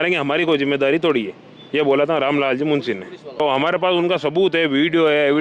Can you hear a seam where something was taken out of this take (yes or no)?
yes